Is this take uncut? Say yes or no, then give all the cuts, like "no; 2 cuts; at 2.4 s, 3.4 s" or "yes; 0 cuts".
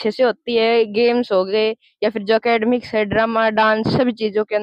yes; 0 cuts